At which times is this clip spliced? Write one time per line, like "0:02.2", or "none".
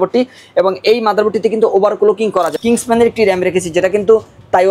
0:02.5